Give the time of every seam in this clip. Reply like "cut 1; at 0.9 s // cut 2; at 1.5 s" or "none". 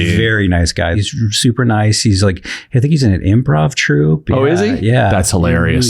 cut 1; at 1.0 s